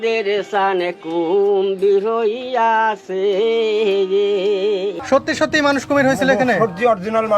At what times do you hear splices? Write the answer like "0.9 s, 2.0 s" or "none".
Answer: 5.0 s